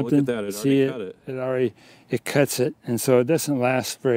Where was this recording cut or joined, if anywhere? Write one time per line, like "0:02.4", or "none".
none